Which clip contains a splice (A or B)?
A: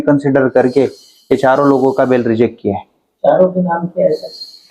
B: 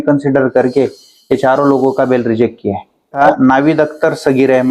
B